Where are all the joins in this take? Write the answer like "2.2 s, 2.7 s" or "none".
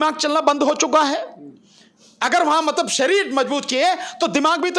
none